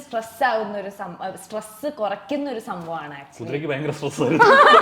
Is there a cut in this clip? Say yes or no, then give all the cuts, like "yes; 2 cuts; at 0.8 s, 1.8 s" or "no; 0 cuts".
no; 0 cuts